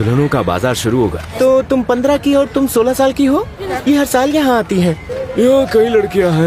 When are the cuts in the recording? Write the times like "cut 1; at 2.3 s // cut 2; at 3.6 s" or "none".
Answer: cut 1; at 1.3 s // cut 2; at 3.6 s // cut 3; at 5.1 s

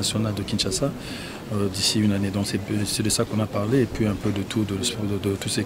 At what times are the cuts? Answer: none

